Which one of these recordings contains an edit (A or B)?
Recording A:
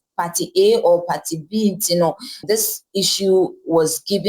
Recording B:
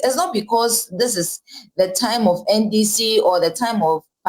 A